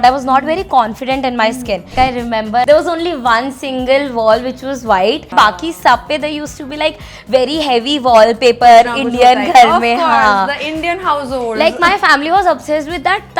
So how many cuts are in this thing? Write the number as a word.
two